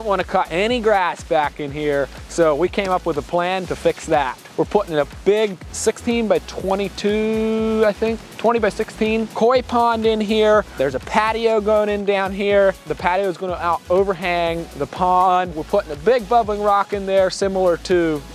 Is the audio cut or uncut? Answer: uncut